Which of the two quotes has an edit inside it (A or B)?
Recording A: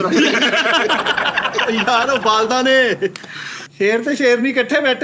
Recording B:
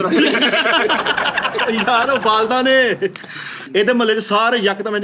A